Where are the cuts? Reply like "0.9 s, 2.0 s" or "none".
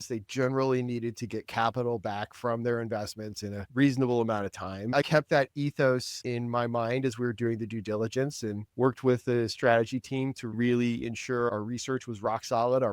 5.0 s, 6.2 s, 10.6 s